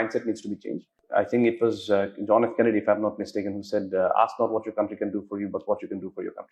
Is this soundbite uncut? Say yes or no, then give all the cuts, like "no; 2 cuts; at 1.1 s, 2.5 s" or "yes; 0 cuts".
yes; 0 cuts